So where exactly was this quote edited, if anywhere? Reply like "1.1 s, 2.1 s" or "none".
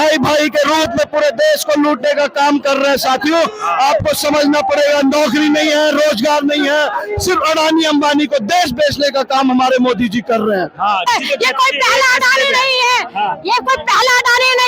11.0 s